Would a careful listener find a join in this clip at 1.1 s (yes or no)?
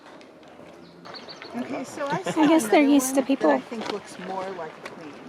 yes